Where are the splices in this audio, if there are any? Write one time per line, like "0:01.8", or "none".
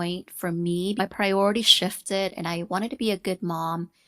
0:01.0